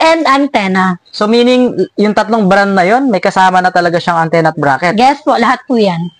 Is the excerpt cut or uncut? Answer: uncut